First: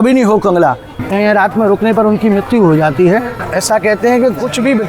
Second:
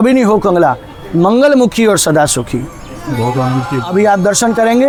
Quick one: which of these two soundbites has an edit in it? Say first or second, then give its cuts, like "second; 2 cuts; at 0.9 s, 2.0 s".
first; 2 cuts; at 1.0 s, 3.4 s